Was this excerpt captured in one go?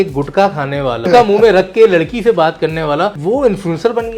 no; 2 cuts; at 1.1 s, 3.2 s

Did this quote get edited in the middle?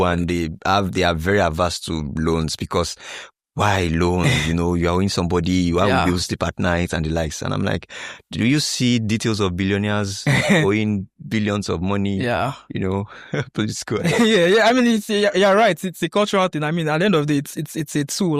no; 0 cuts

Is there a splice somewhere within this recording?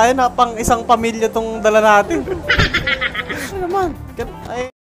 yes; 1 cut; at 3.5 s

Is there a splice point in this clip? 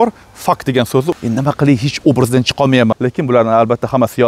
yes; 2 cuts; at 1.1 s, 2.9 s

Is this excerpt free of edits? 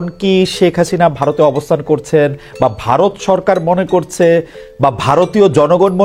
yes; 0 cuts

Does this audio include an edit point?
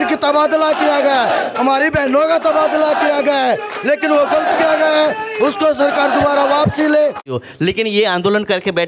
yes; 1 cut; at 7.3 s

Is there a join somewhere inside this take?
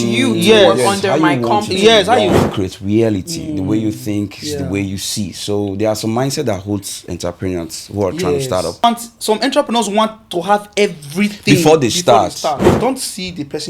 yes; 3 cuts; at 2.3 s, 8.8 s, 12.6 s

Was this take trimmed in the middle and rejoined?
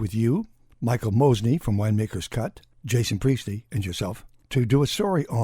yes; 2 cuts; at 2.7 s, 4.3 s

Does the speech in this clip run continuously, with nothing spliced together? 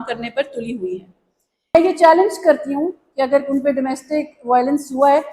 no; 1 cut; at 1.7 s

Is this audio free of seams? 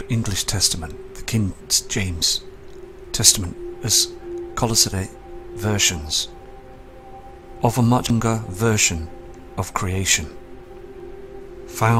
yes; 0 cuts

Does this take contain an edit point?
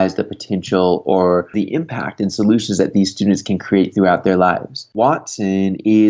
yes; 2 cuts; at 1.5 s, 4.9 s

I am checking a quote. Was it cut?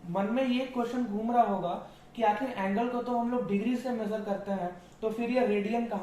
no; 0 cuts

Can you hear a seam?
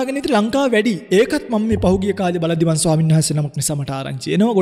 no; 0 cuts

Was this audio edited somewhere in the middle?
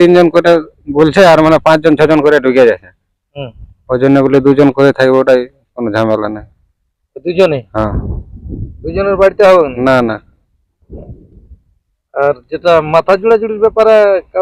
no; 0 cuts

